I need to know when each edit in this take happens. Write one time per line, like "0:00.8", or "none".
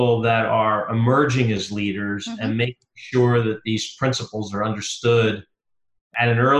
none